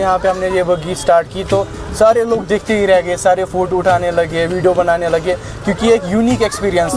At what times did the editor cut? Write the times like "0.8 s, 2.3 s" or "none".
none